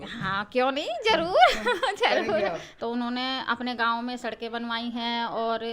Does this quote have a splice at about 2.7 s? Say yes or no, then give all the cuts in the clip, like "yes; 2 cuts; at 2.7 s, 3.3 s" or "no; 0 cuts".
yes; 1 cut; at 2.7 s